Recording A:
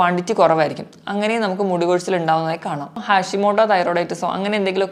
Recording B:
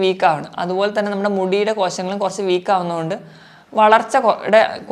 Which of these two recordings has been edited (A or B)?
A